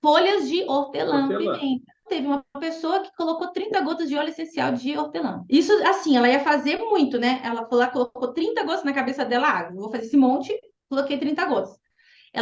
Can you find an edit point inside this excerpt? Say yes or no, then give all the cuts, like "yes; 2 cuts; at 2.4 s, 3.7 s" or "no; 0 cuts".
no; 0 cuts